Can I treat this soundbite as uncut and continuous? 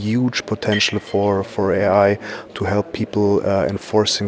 yes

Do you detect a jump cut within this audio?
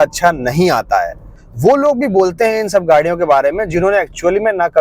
yes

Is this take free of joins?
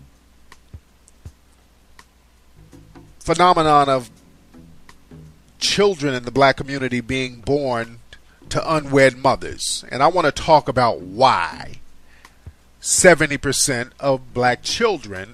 yes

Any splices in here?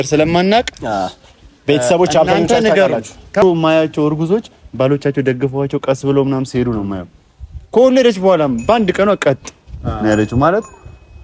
yes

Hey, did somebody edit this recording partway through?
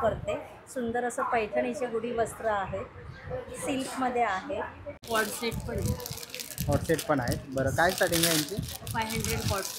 yes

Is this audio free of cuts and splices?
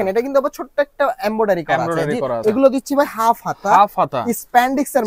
no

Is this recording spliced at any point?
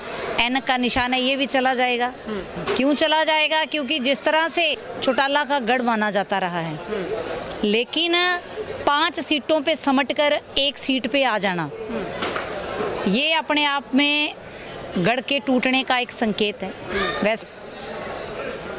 yes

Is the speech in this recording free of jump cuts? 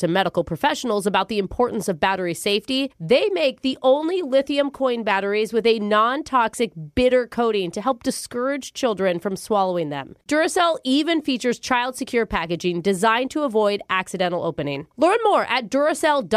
yes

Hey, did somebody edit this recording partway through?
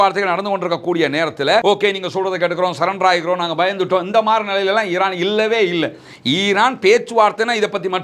yes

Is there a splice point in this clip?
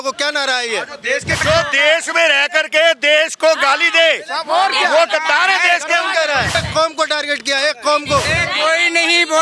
yes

